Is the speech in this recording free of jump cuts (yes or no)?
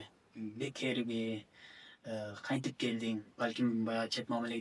yes